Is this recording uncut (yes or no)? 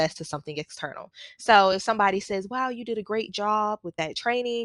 yes